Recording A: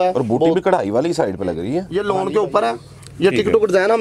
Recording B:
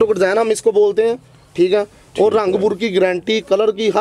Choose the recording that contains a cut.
A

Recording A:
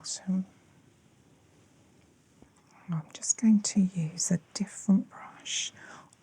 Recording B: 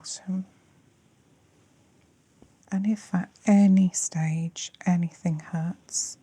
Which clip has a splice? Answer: A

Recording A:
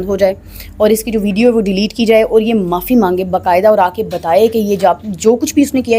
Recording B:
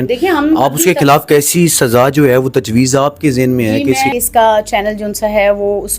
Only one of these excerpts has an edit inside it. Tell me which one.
B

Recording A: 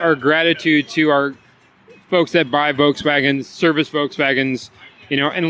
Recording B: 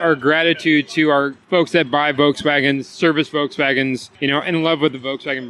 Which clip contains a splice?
B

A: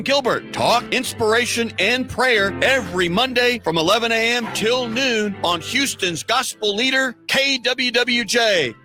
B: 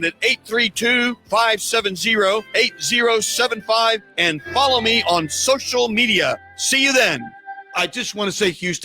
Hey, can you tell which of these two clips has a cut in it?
B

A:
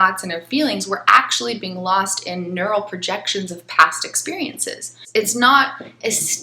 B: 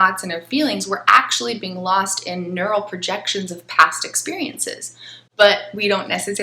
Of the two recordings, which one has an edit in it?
A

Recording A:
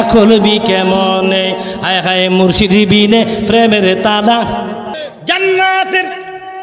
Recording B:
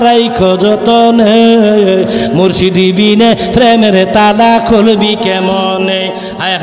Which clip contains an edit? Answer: A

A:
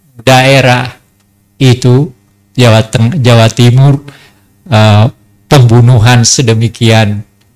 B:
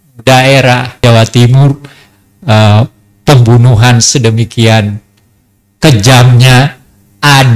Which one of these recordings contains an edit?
B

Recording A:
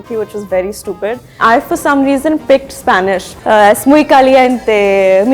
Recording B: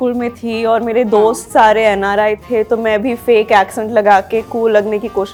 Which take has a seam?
A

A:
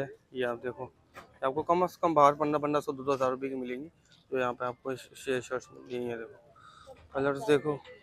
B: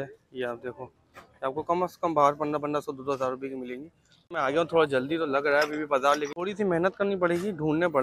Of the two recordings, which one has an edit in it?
B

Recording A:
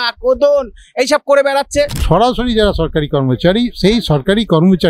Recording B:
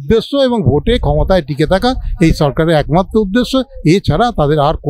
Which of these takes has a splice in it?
A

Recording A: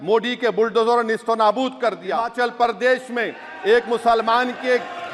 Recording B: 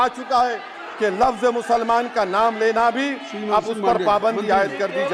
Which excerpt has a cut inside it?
A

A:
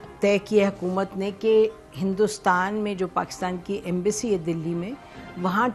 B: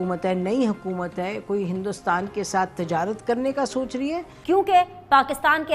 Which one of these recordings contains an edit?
B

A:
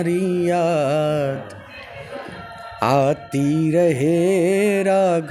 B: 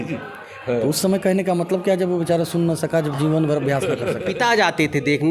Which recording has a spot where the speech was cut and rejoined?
B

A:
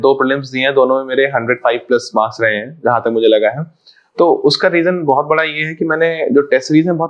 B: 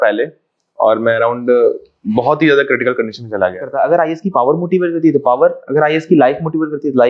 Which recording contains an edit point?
B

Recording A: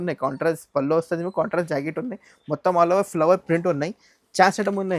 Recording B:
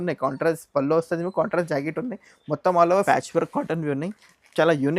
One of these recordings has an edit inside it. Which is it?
B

